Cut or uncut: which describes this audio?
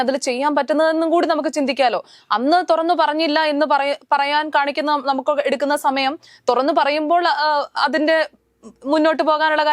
uncut